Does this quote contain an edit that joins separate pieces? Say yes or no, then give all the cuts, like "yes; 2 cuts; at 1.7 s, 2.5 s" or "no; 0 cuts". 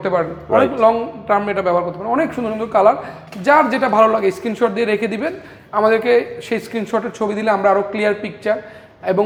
no; 0 cuts